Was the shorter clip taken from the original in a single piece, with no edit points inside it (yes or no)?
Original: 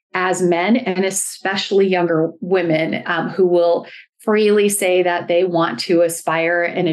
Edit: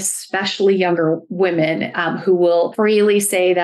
no